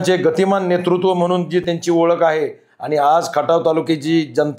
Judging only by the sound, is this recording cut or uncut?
uncut